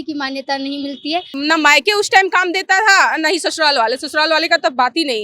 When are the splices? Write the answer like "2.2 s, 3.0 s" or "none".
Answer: 1.4 s